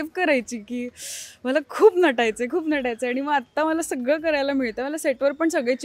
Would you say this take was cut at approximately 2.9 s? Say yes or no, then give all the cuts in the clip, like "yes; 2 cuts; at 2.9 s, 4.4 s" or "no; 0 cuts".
no; 0 cuts